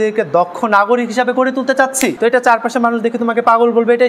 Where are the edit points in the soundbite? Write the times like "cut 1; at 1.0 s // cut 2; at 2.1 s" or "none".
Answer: cut 1; at 2.2 s